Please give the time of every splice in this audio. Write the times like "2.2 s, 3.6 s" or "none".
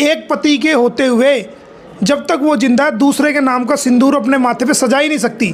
none